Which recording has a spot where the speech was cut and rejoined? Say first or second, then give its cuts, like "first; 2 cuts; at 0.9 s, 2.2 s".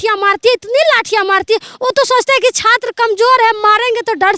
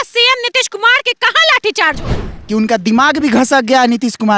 second; 1 cut; at 2.4 s